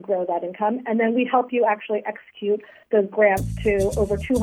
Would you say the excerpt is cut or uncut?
uncut